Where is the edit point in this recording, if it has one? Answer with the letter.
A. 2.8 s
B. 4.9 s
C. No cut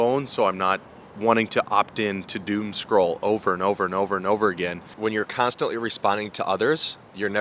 B